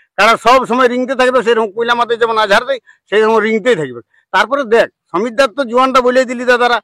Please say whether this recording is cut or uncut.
uncut